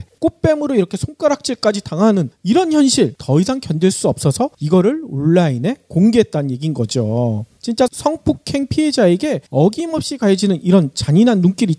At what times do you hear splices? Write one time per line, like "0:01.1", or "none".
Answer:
0:08.8